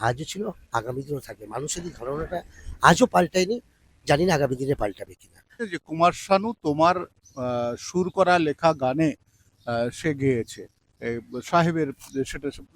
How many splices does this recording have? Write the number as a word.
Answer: one